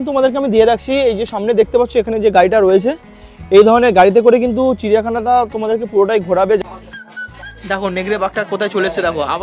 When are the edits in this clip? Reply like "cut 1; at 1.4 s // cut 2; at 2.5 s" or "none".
cut 1; at 6.6 s

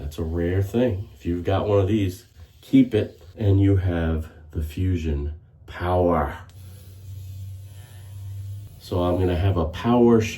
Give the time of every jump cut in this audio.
cut 1; at 3.2 s // cut 2; at 8.7 s

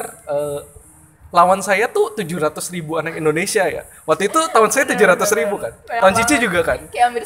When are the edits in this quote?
none

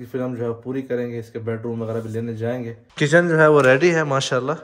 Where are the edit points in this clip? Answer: cut 1; at 2.8 s

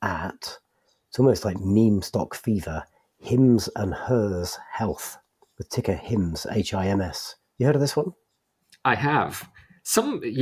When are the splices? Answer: none

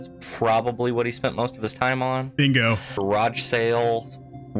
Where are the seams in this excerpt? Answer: cut 1; at 3.0 s

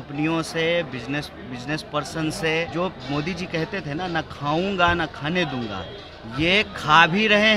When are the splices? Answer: cut 1; at 2.7 s

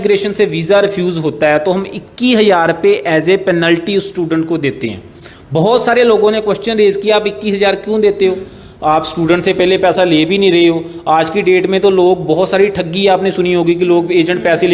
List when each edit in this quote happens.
none

